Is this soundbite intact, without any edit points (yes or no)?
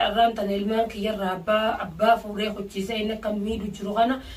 yes